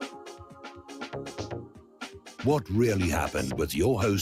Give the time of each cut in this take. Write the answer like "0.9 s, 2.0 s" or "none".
none